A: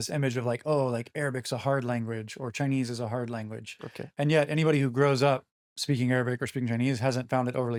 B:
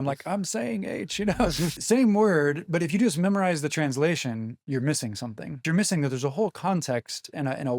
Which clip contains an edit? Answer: B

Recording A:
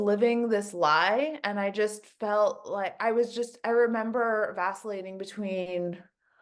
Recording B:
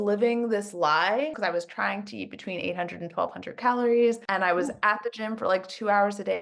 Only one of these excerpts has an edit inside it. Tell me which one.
B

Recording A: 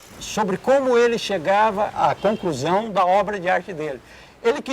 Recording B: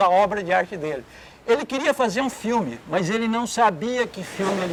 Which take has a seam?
A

